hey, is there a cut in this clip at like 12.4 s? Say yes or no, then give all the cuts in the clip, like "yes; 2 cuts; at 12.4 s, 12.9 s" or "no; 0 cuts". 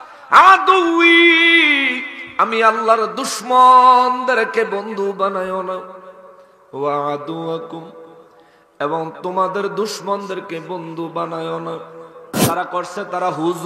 yes; 1 cut; at 12.4 s